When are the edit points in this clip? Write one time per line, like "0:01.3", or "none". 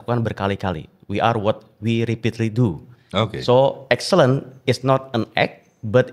none